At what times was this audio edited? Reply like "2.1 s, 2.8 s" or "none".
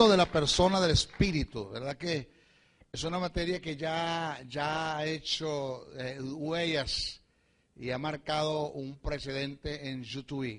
none